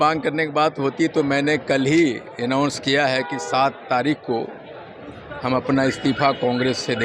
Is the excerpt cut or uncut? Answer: uncut